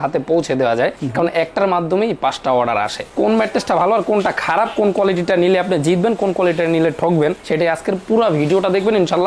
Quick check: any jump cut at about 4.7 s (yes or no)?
no